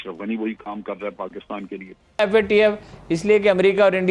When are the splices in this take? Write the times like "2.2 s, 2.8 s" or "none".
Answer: 2.0 s